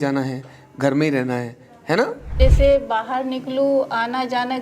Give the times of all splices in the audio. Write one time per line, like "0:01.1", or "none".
0:02.3

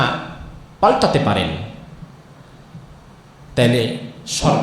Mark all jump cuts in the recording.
none

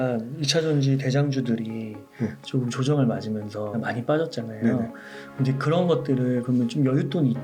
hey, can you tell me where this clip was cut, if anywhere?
0:03.8

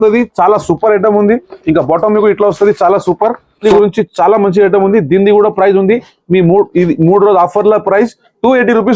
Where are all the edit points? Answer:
0:03.6

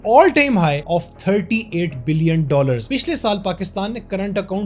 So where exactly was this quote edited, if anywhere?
0:00.8
0:02.8

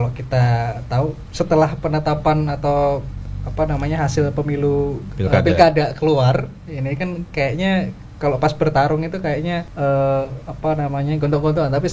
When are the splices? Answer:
0:01.2
0:05.1
0:09.7

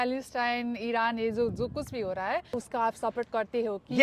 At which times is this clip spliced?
0:02.6

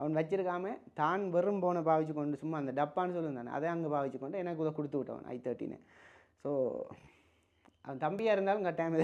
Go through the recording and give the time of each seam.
none

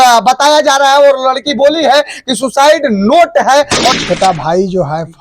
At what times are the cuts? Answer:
0:04.0

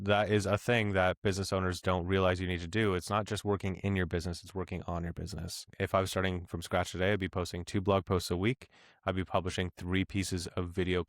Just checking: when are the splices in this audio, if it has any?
0:05.6

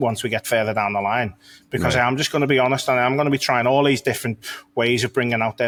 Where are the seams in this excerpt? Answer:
none

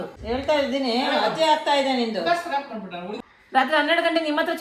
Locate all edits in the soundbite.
0:03.1

